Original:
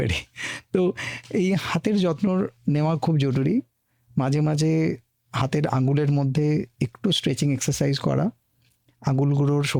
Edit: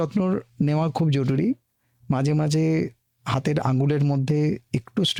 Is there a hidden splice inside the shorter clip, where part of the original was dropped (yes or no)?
no